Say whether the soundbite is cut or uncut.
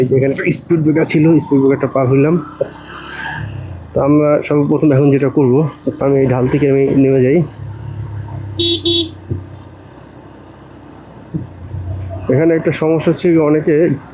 cut